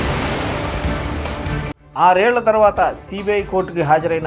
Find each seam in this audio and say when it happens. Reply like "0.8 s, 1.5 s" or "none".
1.7 s